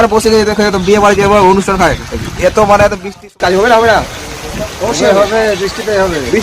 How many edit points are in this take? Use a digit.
1